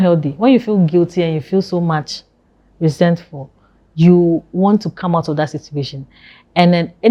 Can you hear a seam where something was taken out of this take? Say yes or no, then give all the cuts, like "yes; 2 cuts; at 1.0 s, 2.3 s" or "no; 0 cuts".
no; 0 cuts